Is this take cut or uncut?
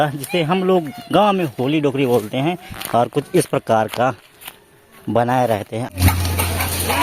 cut